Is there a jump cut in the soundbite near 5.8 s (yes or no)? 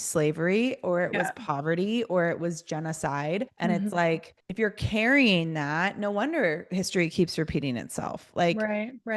no